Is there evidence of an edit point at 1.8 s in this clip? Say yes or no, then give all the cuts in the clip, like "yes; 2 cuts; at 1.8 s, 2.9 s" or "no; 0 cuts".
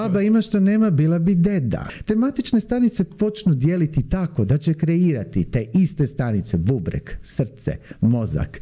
yes; 1 cut; at 1.8 s